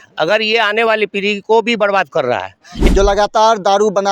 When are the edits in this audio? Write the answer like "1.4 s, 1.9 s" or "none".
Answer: 2.8 s